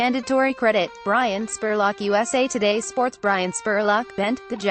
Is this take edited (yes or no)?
no